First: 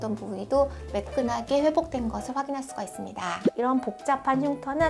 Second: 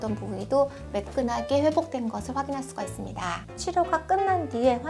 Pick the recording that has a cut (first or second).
first